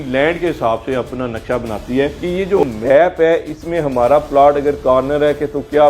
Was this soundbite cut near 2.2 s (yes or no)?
yes